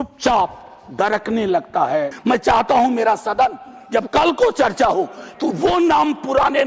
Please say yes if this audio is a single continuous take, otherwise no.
no